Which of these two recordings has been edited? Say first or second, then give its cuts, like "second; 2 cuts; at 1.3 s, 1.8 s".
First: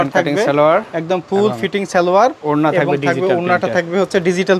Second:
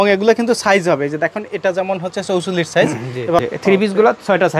second; 1 cut; at 3.4 s